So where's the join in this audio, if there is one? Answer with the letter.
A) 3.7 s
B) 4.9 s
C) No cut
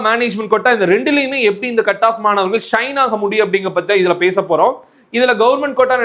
C